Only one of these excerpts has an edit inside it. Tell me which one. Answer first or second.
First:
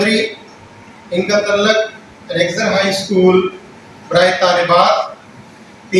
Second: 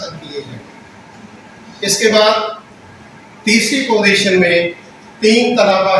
second